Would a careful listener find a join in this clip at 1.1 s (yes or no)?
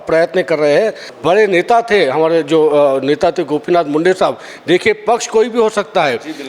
yes